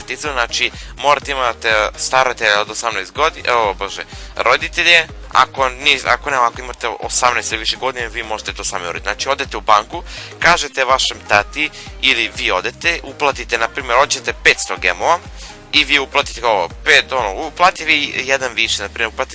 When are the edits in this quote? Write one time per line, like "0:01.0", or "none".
0:16.8